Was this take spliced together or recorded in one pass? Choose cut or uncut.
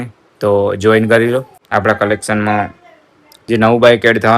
cut